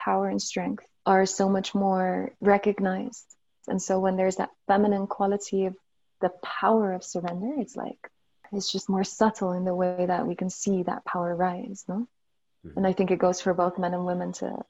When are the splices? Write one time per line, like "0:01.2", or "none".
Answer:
0:00.9
0:02.3
0:03.6
0:08.4